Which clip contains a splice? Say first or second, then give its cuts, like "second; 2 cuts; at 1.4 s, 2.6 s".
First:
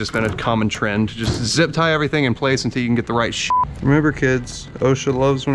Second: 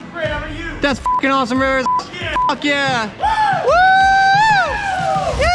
first; 1 cut; at 3.6 s